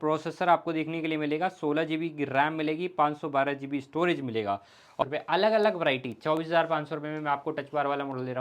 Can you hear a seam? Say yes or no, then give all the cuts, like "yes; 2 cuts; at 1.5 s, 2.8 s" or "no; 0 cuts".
yes; 1 cut; at 5.0 s